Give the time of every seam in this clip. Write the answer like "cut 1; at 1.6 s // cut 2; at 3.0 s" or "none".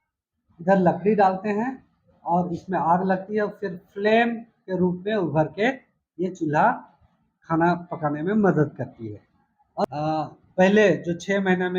cut 1; at 9.8 s

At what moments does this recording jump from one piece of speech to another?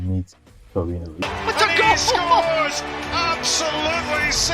cut 1; at 1.2 s

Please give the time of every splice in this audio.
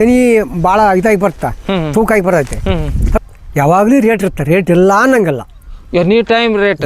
cut 1; at 3.2 s

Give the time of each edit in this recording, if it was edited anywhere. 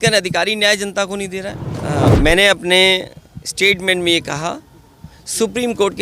cut 1; at 2.0 s

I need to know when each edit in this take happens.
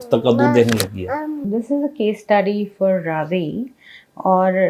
none

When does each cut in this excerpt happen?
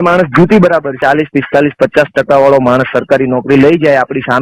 cut 1; at 0.9 s

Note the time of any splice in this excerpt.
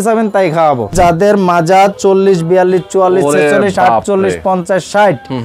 cut 1; at 0.9 s

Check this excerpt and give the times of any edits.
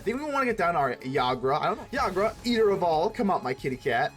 cut 1; at 1.8 s

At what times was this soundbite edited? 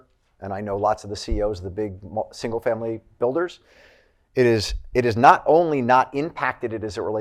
none

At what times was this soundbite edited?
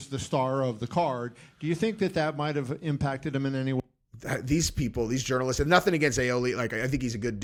none

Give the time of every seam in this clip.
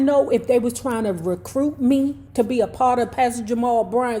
none

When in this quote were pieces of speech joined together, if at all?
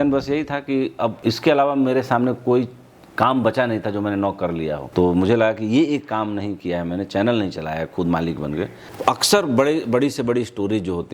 cut 1; at 1.2 s // cut 2; at 4.8 s // cut 3; at 8.8 s

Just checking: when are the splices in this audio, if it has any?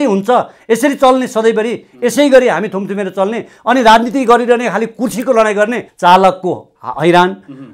cut 1; at 5.9 s

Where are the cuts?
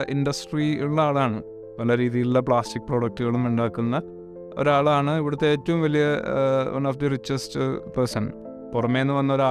cut 1; at 8.4 s

